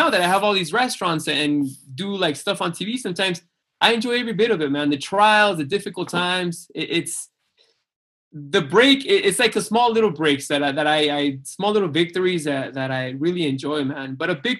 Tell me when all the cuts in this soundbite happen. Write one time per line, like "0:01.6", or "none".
none